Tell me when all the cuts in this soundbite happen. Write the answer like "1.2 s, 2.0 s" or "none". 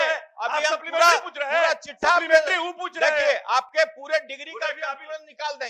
none